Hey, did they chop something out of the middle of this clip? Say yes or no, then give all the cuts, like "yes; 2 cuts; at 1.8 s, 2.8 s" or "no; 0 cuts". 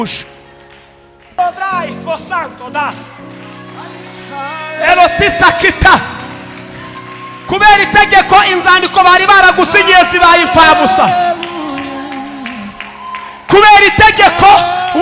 yes; 1 cut; at 1.4 s